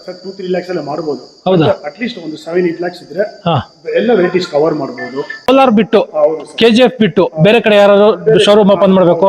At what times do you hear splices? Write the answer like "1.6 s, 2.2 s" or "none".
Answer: 5.5 s